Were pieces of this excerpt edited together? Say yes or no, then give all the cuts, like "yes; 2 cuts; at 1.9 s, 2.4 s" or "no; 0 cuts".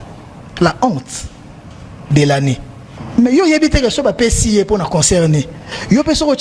no; 0 cuts